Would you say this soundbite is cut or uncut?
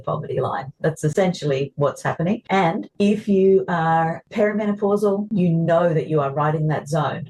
cut